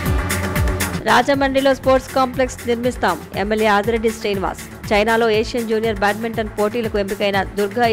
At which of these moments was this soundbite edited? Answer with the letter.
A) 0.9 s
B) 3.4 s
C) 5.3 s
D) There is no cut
A